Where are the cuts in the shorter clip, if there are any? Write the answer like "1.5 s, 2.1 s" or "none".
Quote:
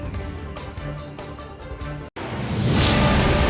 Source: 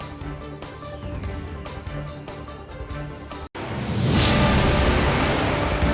2.1 s